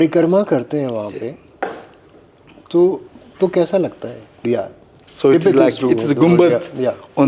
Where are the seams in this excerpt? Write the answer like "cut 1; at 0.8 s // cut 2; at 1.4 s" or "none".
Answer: cut 1; at 4.4 s